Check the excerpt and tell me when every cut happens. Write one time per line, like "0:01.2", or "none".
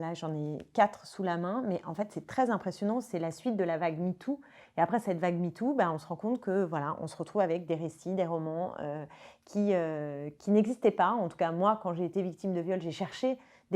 none